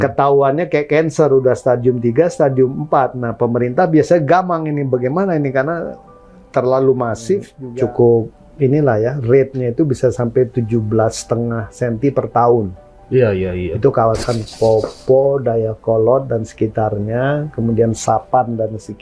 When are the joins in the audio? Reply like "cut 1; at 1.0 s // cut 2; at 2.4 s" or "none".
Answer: cut 1; at 7.6 s